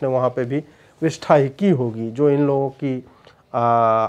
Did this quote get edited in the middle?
no; 0 cuts

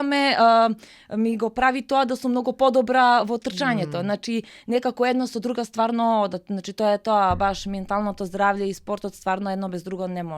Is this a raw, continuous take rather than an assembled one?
yes; 0 cuts

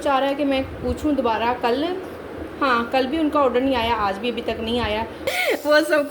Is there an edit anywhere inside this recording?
yes; 1 cut; at 5.2 s

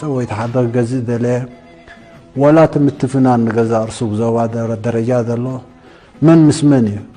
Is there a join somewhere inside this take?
no; 0 cuts

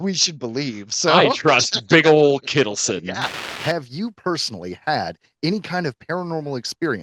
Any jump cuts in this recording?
yes; 1 cut; at 3.4 s

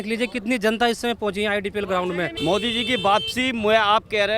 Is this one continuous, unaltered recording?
no; 1 cut; at 2.3 s

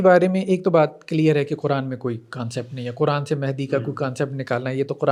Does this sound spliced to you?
no; 0 cuts

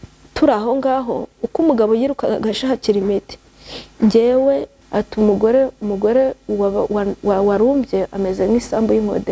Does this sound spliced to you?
yes; 1 cut; at 4.8 s

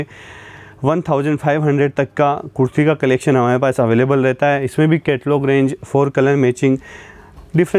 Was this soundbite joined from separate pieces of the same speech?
no; 0 cuts

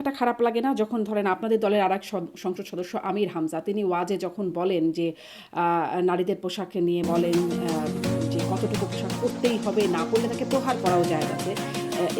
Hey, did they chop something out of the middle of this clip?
no; 0 cuts

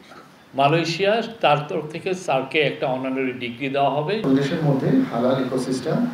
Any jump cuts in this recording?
yes; 1 cut; at 4.2 s

